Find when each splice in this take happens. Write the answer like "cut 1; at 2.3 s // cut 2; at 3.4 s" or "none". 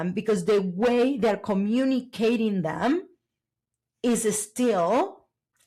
none